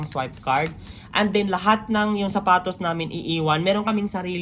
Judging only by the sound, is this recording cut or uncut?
uncut